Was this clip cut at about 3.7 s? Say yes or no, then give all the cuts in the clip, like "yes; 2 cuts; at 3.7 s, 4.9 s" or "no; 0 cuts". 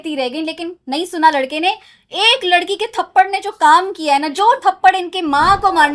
no; 0 cuts